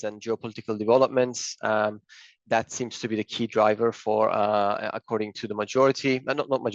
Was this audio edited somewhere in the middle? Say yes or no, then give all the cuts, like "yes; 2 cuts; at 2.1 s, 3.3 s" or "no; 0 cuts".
no; 0 cuts